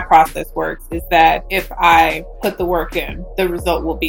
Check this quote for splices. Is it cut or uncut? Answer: cut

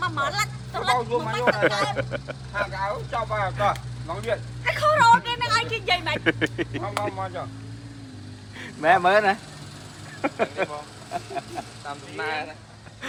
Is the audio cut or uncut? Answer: uncut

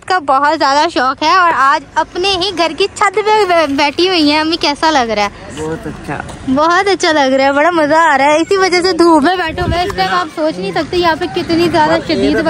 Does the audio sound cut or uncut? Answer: uncut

